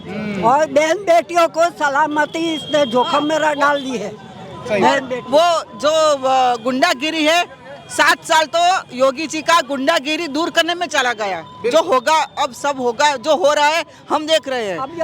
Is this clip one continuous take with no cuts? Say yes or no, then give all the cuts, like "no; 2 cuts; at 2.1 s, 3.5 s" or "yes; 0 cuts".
yes; 0 cuts